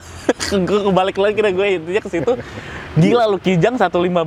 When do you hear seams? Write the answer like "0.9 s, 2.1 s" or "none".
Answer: none